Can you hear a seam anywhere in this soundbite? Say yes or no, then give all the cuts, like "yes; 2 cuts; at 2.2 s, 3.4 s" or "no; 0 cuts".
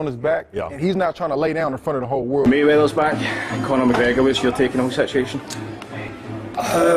no; 0 cuts